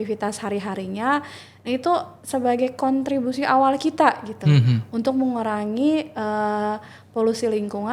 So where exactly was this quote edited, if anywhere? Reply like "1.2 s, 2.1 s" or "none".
none